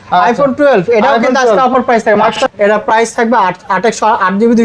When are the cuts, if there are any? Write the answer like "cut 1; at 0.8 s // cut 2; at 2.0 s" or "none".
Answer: cut 1; at 2.3 s